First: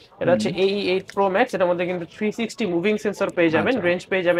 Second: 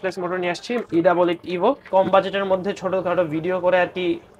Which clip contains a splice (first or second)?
second